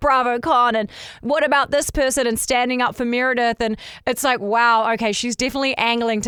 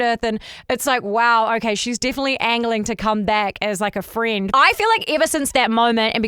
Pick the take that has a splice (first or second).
second